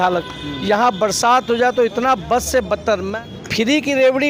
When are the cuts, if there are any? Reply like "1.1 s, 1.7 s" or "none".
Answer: 3.1 s